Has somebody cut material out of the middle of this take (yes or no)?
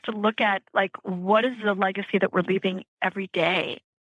no